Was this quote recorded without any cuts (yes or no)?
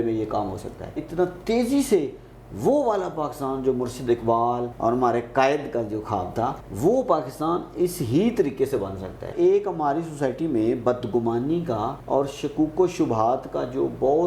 no